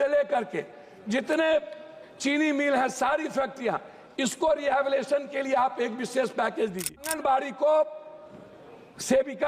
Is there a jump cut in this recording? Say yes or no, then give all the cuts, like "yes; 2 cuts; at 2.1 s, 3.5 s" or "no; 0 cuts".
yes; 1 cut; at 7.1 s